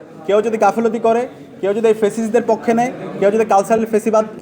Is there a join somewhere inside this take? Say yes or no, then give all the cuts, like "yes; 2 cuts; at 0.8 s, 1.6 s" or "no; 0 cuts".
no; 0 cuts